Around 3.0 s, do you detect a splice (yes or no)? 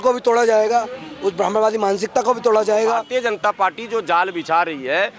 yes